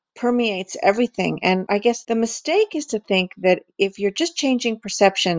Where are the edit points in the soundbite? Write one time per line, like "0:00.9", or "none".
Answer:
0:01.7